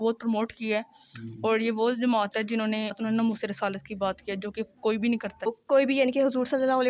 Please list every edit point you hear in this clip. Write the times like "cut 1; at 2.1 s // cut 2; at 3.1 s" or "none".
cut 1; at 3.0 s // cut 2; at 5.6 s